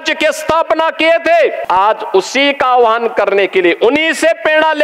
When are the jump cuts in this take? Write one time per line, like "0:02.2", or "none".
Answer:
0:01.6

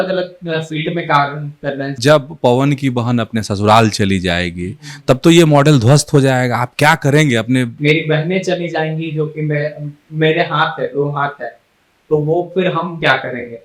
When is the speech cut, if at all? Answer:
0:01.9
0:07.7

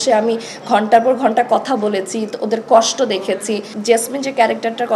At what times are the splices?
0:03.7

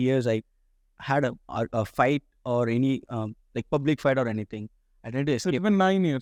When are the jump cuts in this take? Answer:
none

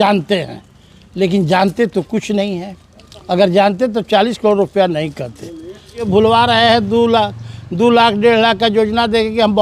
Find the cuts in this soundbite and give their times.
0:06.1

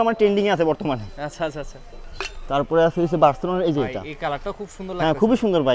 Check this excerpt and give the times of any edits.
none

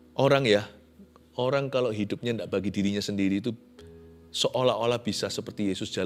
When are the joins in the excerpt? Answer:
none

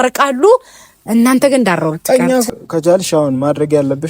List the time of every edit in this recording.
0:02.5

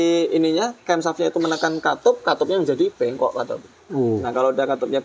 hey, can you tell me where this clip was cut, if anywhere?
none

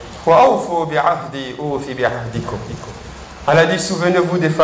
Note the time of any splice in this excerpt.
none

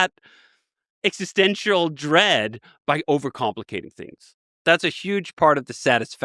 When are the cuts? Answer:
0:04.5

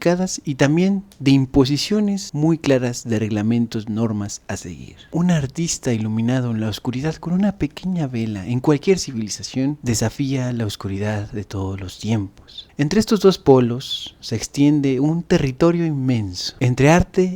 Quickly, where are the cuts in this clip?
0:05.0
0:12.6

